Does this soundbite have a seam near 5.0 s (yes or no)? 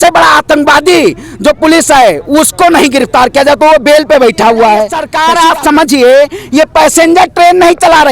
yes